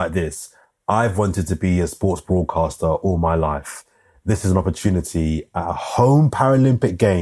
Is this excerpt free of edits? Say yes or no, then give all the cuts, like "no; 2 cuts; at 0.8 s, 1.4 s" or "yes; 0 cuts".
yes; 0 cuts